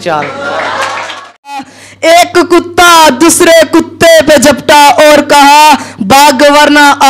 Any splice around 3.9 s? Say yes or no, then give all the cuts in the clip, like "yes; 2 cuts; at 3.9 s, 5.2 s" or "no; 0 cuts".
no; 1 cut; at 1.7 s